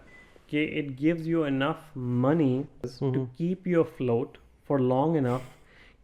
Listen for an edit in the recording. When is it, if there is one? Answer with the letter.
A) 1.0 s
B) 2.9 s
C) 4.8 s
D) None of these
B